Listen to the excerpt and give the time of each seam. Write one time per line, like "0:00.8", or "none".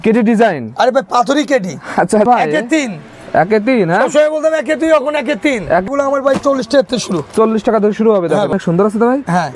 0:02.3
0:05.9
0:08.5